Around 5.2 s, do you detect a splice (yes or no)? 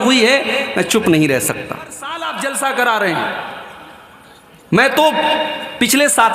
no